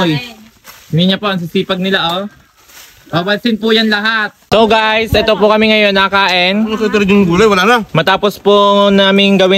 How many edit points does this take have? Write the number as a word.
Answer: one